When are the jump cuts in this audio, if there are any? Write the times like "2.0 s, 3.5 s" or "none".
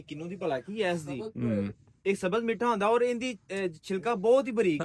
none